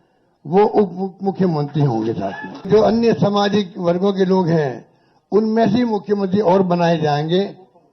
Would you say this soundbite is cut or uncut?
cut